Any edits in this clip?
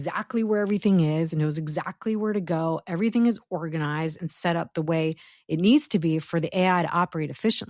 no; 0 cuts

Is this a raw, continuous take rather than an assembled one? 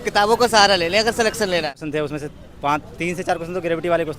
no; 1 cut; at 1.8 s

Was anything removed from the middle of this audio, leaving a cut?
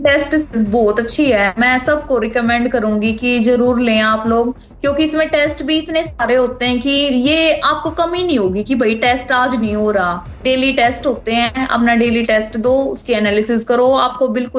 no; 0 cuts

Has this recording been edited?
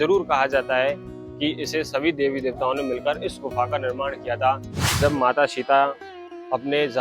yes; 1 cut; at 4.8 s

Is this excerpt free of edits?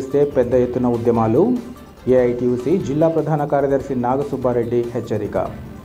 yes; 0 cuts

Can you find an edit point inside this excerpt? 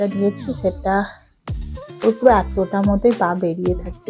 no; 0 cuts

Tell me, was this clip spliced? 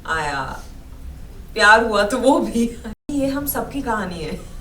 yes; 1 cut; at 3.0 s

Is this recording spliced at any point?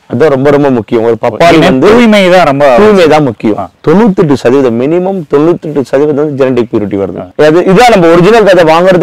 no; 0 cuts

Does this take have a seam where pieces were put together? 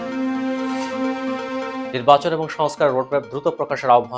no; 0 cuts

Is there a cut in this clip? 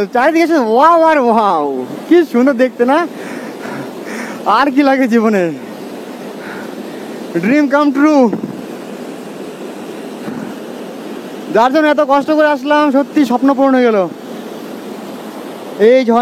no; 0 cuts

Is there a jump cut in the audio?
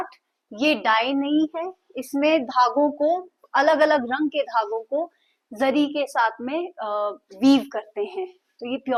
no; 0 cuts

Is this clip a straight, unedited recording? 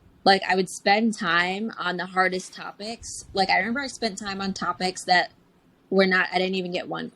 no; 1 cut; at 3.3 s

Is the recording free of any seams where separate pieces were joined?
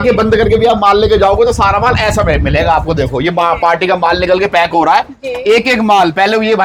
yes; 0 cuts

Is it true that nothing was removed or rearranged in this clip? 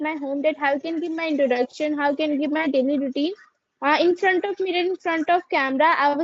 yes; 0 cuts

